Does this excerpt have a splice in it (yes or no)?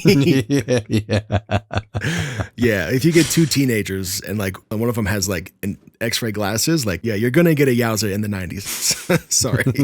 yes